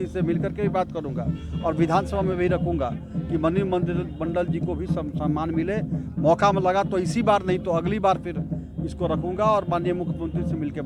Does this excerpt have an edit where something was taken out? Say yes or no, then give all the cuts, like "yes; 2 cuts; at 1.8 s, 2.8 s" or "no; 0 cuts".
no; 0 cuts